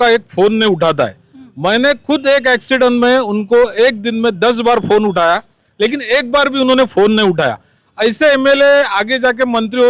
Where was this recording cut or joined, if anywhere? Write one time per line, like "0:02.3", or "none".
none